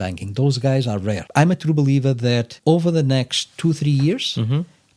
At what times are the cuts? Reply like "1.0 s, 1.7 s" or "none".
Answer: 1.2 s, 2.5 s